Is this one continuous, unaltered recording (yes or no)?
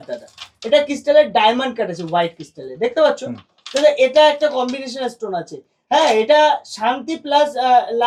yes